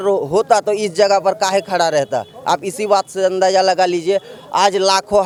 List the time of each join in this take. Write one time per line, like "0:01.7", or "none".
none